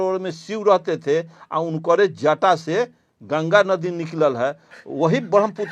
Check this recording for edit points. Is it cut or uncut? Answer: uncut